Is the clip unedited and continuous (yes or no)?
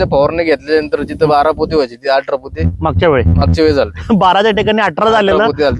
yes